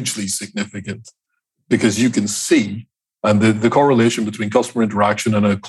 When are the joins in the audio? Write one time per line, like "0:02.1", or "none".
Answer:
none